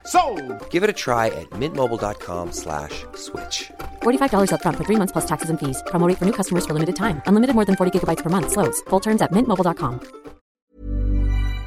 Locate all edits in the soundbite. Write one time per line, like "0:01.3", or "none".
0:10.5